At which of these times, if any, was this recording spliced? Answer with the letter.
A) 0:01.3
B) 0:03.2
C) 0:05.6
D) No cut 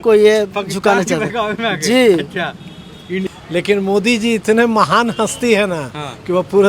B